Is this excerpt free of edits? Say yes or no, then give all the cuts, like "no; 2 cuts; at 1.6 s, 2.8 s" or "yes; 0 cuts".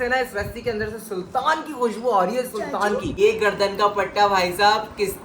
no; 1 cut; at 3.1 s